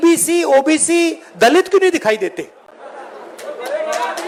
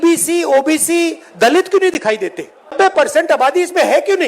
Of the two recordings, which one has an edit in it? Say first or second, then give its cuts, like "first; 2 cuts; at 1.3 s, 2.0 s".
second; 1 cut; at 2.7 s